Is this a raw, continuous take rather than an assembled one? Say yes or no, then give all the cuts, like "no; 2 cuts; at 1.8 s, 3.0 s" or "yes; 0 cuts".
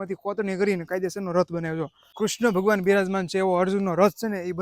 no; 1 cut; at 2.1 s